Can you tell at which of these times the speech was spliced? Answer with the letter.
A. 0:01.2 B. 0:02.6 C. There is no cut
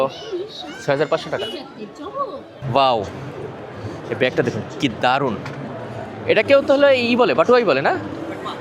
B